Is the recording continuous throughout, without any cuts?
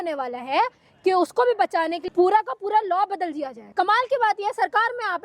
no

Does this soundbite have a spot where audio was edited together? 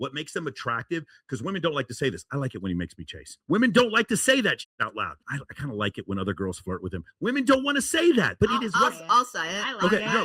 yes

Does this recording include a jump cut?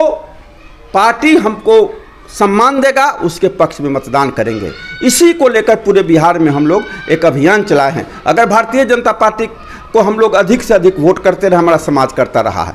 no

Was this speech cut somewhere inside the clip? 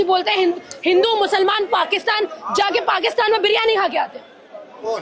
no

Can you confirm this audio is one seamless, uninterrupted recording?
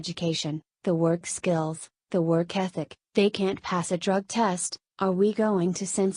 no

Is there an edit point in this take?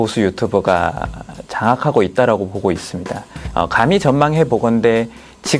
yes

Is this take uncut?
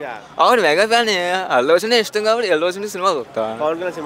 yes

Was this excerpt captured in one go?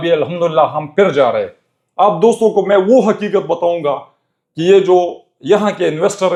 yes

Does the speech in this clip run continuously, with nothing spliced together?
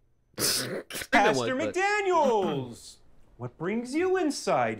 no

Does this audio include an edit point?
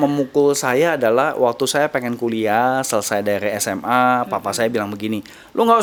no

